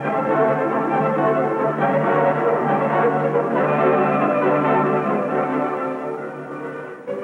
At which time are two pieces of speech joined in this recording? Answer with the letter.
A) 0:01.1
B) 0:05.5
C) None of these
B